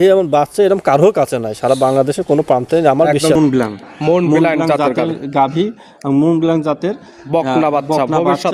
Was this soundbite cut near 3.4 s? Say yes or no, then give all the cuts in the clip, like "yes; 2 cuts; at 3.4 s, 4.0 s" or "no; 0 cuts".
yes; 1 cut; at 3.4 s